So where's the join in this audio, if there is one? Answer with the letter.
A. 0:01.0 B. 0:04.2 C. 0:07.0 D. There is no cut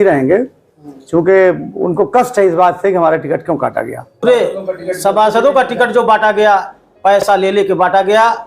B